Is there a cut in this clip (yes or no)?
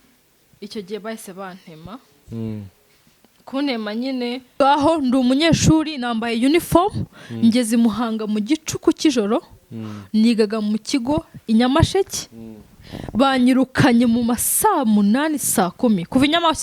yes